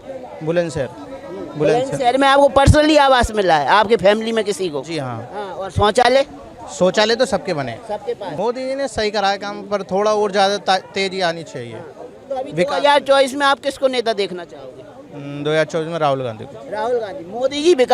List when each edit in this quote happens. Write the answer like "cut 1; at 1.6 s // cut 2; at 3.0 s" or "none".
cut 1; at 8.3 s